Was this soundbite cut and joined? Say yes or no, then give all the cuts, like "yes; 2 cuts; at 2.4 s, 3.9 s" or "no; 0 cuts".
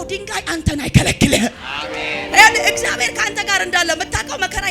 yes; 1 cut; at 2.3 s